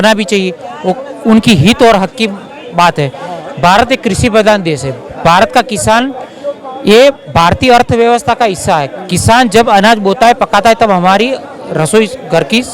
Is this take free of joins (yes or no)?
yes